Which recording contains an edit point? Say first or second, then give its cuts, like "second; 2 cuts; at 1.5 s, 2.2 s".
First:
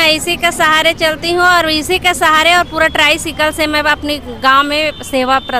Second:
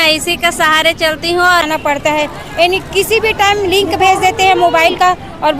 second; 1 cut; at 1.7 s